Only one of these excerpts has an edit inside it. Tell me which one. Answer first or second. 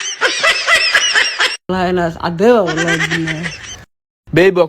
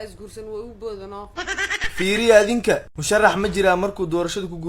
first